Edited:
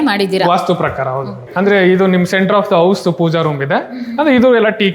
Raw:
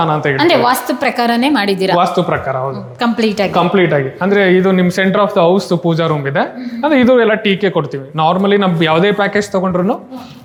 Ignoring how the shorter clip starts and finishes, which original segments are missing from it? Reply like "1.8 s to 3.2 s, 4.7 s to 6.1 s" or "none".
2.9 s to 4.1 s